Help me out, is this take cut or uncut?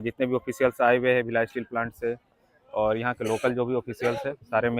uncut